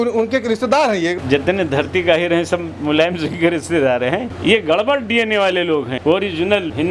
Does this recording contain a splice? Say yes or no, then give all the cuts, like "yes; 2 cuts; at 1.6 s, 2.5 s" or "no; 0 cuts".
yes; 2 cuts; at 1.2 s, 4.4 s